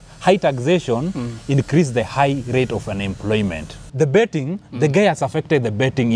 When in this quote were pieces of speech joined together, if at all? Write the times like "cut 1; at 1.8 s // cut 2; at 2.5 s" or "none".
cut 1; at 3.8 s